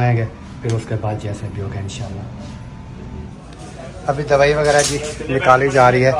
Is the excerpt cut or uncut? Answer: uncut